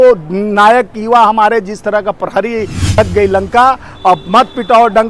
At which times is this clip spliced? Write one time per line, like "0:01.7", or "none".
0:03.0